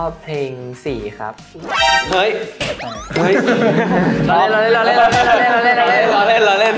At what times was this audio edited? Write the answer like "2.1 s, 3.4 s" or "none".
none

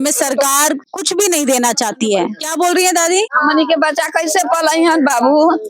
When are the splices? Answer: 0.9 s, 2.4 s, 3.3 s

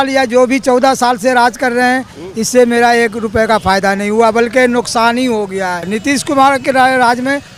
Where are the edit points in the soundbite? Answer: 5.9 s

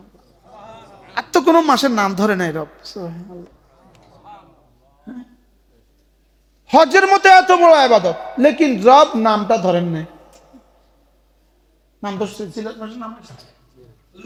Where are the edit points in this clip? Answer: none

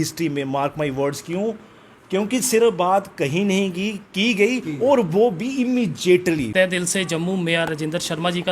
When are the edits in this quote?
6.5 s

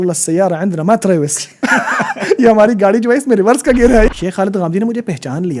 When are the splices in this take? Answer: 4.1 s

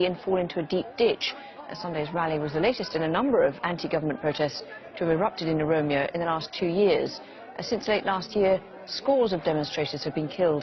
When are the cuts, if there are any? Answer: 8.7 s

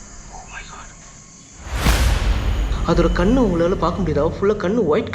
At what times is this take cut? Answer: 1.5 s, 2.7 s

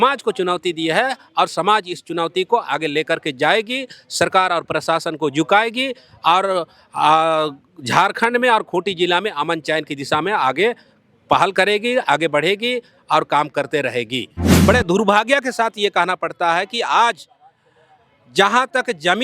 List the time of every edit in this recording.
14.5 s

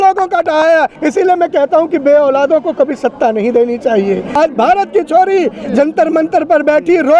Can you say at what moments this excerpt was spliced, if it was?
1.0 s, 4.4 s

